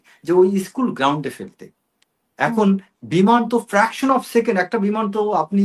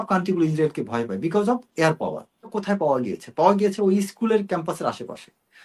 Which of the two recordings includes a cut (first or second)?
second